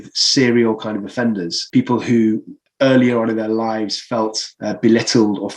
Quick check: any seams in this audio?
yes; 3 cuts; at 1.5 s, 2.6 s, 4.5 s

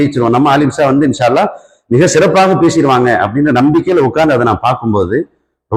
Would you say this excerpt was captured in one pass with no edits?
yes; 0 cuts

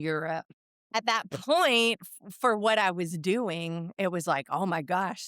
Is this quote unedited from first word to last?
no; 1 cut; at 0.9 s

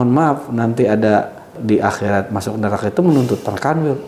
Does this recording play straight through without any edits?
no; 1 cut; at 1.6 s

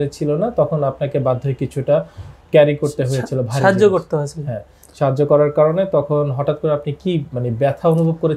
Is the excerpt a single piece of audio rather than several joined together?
yes; 0 cuts

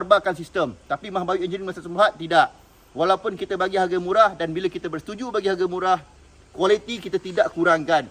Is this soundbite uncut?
yes; 0 cuts

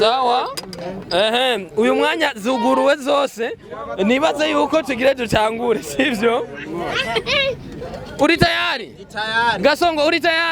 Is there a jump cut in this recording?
no; 0 cuts

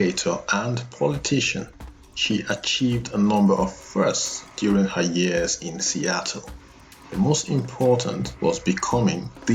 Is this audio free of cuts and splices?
yes; 0 cuts

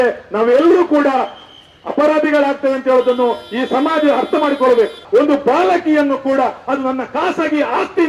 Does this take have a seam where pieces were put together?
yes; 1 cut; at 5.0 s

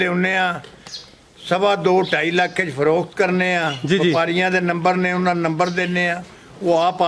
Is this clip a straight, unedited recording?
yes; 0 cuts

